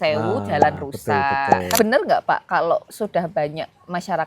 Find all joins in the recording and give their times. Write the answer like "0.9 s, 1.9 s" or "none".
1.8 s